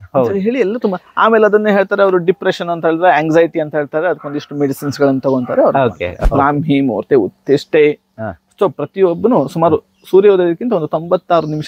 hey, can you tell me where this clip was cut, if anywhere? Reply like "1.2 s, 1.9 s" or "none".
6.1 s